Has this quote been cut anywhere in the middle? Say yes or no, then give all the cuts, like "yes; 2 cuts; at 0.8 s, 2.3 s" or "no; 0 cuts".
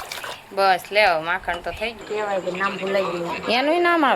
yes; 1 cut; at 2.0 s